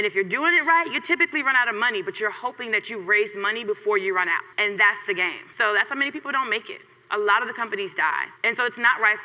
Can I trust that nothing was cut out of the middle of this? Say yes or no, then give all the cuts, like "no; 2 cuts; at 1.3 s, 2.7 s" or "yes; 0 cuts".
no; 3 cuts; at 4.5 s, 5.4 s, 8.3 s